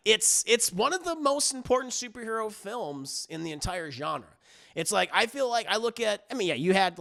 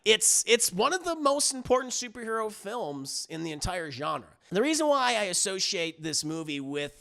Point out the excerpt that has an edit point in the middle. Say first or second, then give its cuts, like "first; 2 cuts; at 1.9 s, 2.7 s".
second; 1 cut; at 4.3 s